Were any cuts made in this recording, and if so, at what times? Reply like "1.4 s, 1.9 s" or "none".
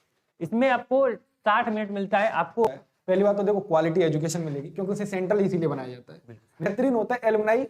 2.7 s, 6.6 s